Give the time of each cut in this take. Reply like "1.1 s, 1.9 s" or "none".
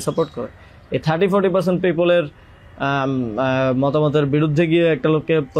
none